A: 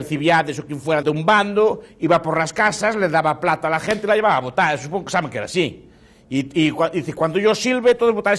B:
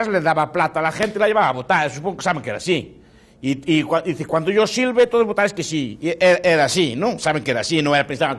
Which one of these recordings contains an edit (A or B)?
A